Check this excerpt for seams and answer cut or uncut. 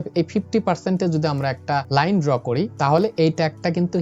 cut